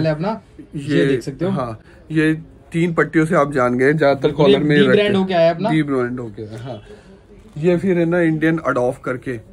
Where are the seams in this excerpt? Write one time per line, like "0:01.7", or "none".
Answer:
none